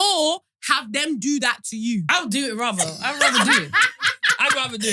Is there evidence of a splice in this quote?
yes; 1 cut; at 2.1 s

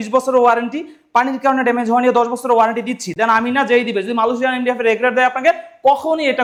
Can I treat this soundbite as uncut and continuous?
yes; 0 cuts

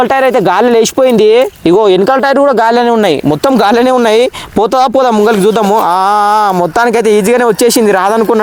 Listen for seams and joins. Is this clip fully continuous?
yes; 0 cuts

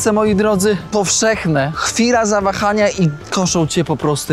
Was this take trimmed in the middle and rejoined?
yes; 3 cuts; at 0.9 s, 1.8 s, 3.2 s

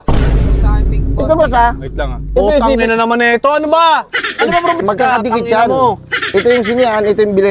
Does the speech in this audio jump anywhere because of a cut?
yes; 1 cut; at 4.8 s

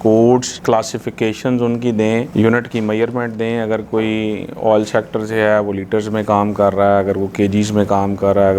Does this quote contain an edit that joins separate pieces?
no; 0 cuts

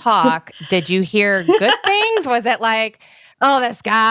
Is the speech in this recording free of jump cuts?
yes; 0 cuts

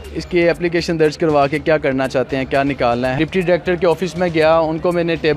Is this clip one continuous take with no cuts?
no; 1 cut; at 3.1 s

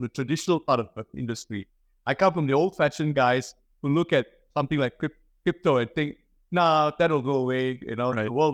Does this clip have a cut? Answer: no; 0 cuts

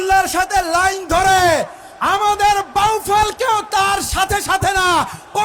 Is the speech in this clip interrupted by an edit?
no; 0 cuts

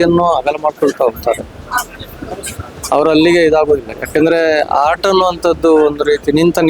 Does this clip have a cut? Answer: no; 0 cuts

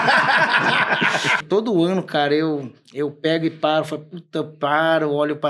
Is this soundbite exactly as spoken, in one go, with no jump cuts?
no; 1 cut; at 1.4 s

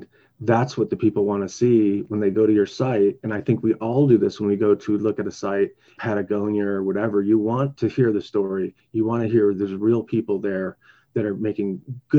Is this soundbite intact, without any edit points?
no; 2 cuts; at 5.9 s, 7.7 s

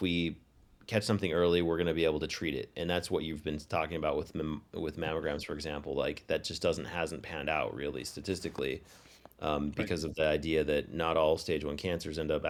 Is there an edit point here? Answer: no; 0 cuts

